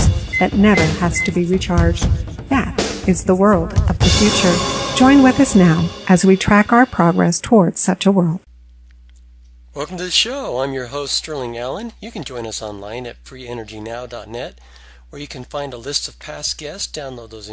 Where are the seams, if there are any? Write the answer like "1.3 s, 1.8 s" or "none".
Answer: 8.3 s